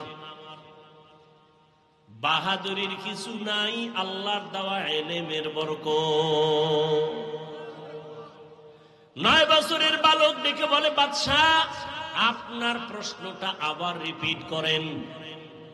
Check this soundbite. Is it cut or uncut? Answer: cut